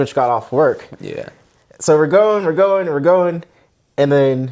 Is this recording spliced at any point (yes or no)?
no